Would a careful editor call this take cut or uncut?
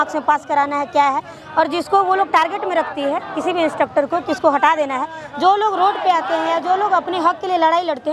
uncut